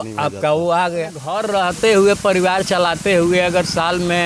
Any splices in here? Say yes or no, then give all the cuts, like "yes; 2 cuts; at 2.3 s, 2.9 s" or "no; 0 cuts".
yes; 1 cut; at 1.3 s